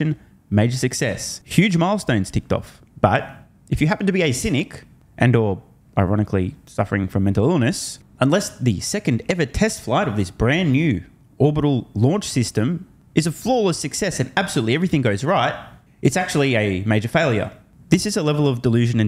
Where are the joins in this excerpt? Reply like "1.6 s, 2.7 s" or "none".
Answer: none